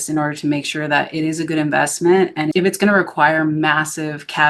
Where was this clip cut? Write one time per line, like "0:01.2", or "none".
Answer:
none